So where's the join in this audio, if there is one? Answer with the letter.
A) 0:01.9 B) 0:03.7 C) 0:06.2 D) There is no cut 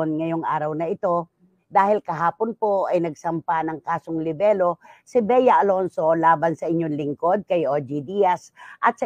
D